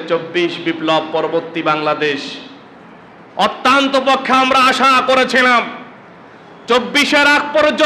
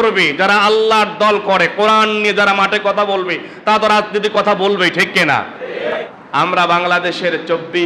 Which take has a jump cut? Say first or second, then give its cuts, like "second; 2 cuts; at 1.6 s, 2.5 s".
second; 1 cut; at 6.2 s